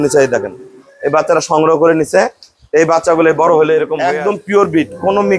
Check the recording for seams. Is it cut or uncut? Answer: cut